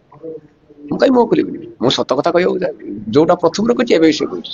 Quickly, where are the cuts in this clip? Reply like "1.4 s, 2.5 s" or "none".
none